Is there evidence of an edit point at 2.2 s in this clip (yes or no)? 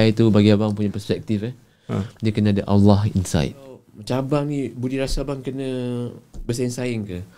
no